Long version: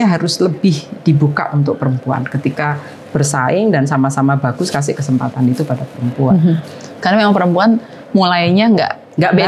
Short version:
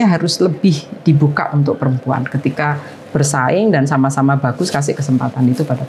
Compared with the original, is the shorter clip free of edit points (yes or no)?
yes